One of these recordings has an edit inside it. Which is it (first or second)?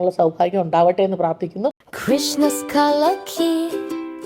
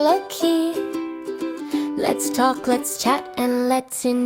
first